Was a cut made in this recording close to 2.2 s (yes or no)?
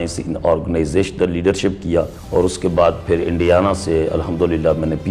yes